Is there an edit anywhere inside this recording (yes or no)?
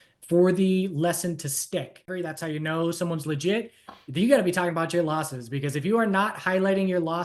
yes